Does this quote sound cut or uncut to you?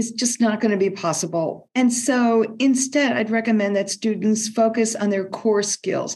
cut